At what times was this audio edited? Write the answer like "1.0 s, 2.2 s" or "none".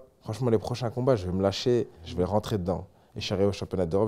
2.0 s